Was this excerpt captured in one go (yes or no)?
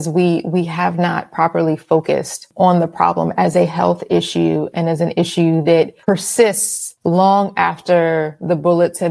no